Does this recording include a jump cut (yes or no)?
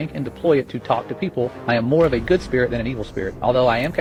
no